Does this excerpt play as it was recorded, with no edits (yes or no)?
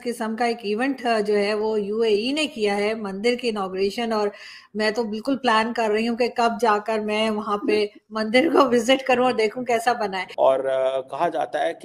no